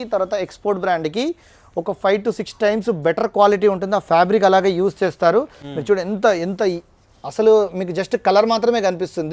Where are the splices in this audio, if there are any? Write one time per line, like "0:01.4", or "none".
none